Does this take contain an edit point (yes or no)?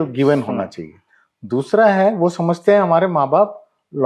no